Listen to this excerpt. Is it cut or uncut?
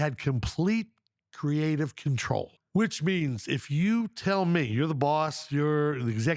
cut